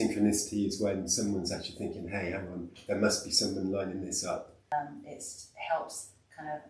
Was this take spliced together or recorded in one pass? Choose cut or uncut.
cut